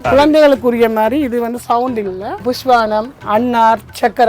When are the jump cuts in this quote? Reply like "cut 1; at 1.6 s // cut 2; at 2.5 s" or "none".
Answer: cut 1; at 2.4 s